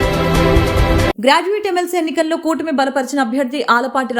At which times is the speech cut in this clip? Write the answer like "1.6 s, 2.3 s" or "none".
1.1 s